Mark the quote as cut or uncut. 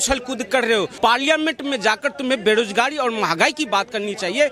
cut